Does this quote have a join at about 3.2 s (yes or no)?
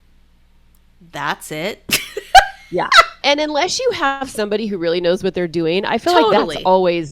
yes